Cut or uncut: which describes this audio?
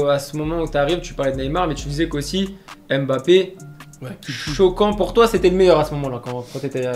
uncut